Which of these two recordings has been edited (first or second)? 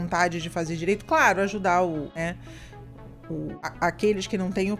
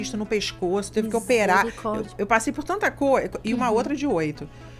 first